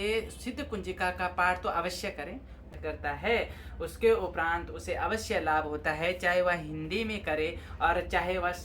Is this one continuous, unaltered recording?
no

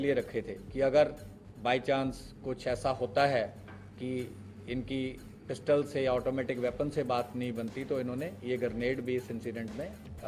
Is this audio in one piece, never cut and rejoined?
yes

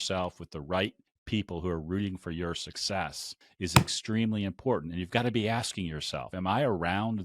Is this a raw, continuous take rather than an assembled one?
no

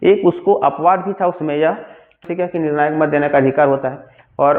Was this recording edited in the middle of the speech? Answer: yes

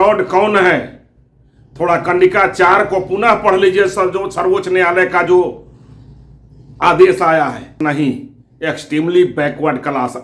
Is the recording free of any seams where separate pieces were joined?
no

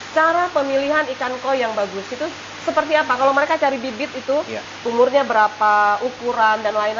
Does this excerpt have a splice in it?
no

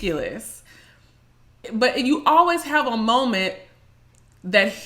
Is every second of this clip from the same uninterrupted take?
no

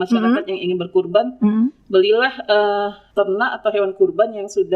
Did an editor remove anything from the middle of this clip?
yes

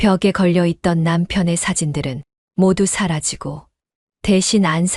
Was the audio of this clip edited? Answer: no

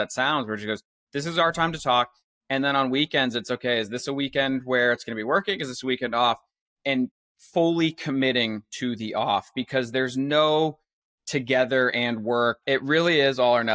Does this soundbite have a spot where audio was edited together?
yes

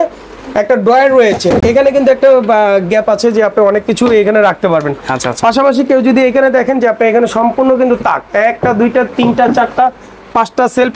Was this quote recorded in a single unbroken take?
yes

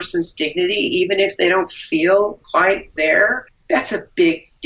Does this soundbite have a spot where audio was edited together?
yes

